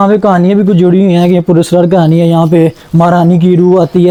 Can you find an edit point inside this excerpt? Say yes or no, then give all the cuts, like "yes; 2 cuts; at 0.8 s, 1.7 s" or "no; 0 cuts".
no; 0 cuts